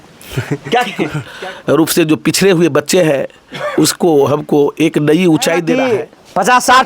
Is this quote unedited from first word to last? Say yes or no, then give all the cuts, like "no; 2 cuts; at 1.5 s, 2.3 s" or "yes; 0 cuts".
no; 2 cuts; at 1.3 s, 5.7 s